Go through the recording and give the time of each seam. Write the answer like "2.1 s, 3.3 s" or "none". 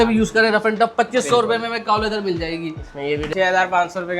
3.3 s